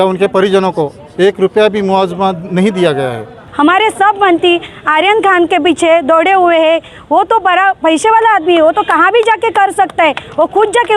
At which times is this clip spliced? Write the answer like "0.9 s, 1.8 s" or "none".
3.4 s